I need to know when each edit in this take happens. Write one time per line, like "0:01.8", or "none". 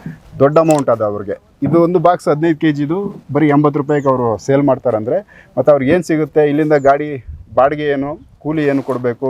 none